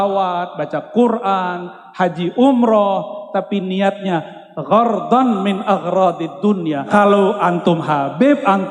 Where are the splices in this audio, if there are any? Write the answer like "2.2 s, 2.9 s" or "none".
6.9 s